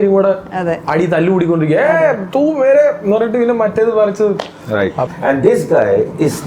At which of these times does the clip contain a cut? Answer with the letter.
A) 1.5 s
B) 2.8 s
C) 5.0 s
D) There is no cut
C